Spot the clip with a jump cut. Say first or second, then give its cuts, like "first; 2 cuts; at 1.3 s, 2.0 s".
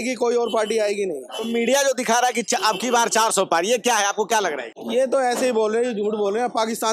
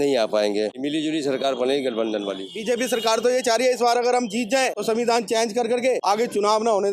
second; 4 cuts; at 0.8 s, 2.5 s, 4.8 s, 6.0 s